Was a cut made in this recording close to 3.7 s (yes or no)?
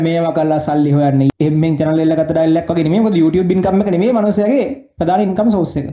no